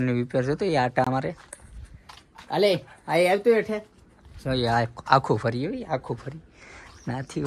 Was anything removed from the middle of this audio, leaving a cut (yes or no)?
no